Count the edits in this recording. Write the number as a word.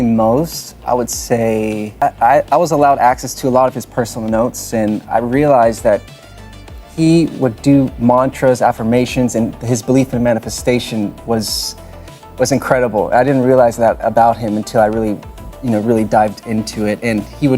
one